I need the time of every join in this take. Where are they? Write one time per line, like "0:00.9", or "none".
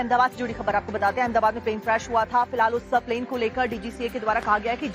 0:00.9